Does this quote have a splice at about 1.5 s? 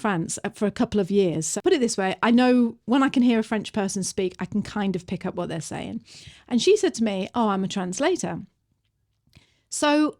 yes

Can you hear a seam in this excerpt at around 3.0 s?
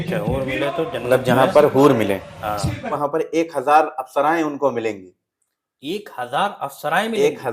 yes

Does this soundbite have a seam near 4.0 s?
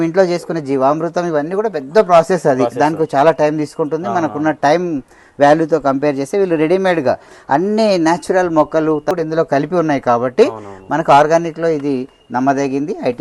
no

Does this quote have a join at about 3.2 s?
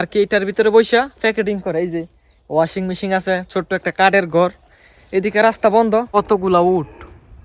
no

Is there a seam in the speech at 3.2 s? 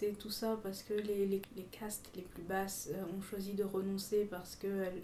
no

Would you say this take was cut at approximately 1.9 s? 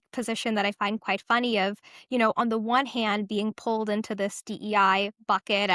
no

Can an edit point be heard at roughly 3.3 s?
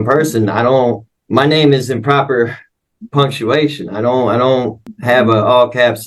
no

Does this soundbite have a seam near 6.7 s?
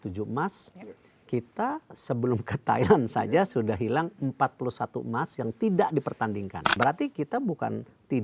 yes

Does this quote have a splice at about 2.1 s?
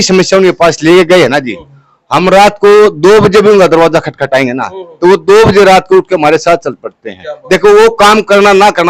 no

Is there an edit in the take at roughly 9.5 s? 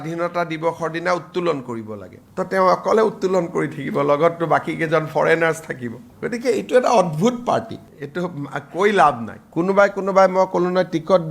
yes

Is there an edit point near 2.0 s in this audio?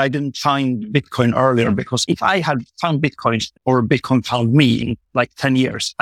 yes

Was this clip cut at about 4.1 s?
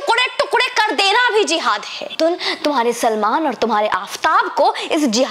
no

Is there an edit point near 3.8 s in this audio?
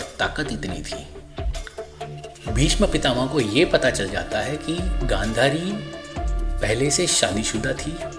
no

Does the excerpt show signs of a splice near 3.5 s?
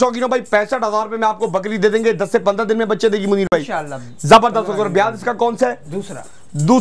no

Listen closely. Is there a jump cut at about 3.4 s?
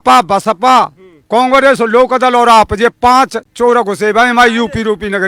no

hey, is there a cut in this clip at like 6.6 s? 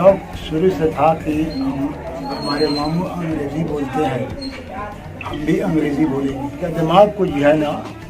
yes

